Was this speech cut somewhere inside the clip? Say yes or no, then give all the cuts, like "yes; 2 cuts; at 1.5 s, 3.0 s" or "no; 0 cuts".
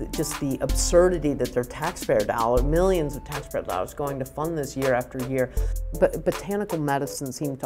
yes; 1 cut; at 5.8 s